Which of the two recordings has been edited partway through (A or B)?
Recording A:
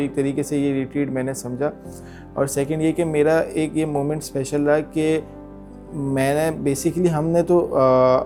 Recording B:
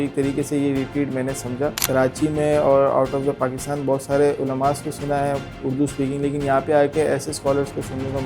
B